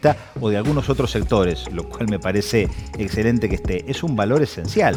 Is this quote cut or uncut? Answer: uncut